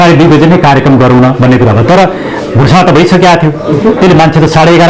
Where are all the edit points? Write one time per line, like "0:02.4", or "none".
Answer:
none